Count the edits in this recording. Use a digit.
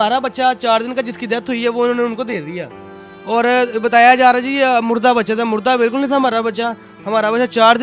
0